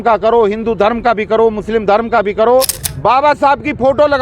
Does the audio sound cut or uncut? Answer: cut